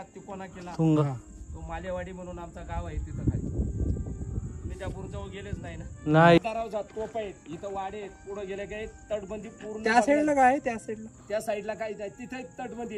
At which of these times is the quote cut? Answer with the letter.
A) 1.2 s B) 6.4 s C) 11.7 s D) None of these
B